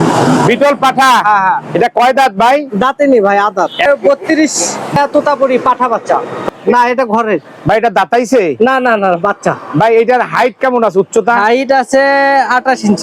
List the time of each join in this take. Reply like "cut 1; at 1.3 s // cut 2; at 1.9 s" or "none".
cut 1; at 3.8 s // cut 2; at 5.0 s // cut 3; at 6.4 s